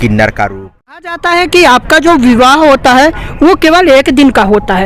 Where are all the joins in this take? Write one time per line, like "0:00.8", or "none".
0:01.2

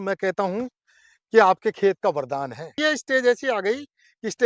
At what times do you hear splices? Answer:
0:02.8

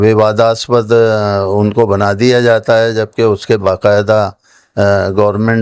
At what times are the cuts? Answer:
none

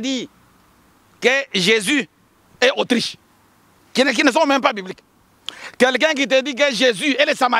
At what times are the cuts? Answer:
none

